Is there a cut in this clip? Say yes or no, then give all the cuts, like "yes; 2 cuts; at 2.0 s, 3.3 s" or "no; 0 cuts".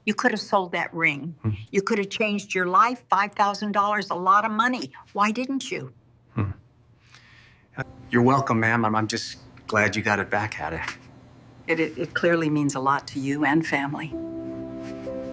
yes; 1 cut; at 7.9 s